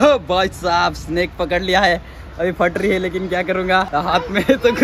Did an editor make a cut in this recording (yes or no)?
no